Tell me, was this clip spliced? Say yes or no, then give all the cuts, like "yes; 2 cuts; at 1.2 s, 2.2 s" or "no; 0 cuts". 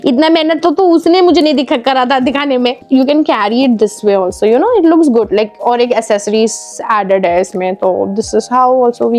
no; 0 cuts